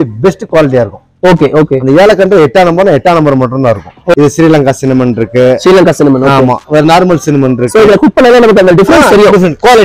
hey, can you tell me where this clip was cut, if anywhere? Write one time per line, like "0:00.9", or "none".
0:04.1